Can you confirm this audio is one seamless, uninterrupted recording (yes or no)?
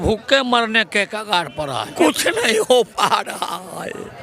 no